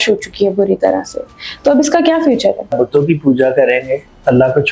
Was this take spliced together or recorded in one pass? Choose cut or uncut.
cut